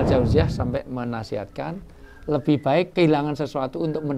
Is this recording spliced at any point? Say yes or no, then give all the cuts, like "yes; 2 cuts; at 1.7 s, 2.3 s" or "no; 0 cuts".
yes; 1 cut; at 2.9 s